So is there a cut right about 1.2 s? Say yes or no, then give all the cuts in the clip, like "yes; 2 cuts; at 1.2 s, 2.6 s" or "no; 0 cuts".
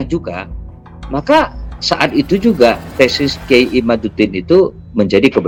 no; 0 cuts